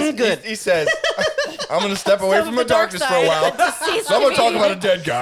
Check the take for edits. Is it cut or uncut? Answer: uncut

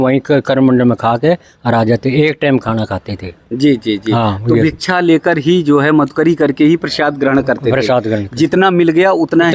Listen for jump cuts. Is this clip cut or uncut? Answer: uncut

